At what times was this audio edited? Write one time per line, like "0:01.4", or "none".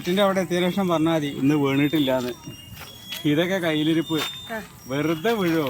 none

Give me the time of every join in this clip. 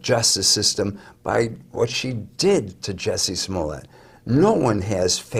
none

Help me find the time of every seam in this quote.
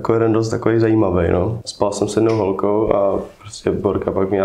0:01.6

